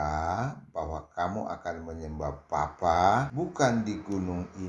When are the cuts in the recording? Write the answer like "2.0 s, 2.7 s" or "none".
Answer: 3.3 s